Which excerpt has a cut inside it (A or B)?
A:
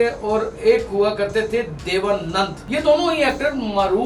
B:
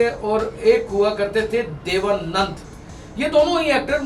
A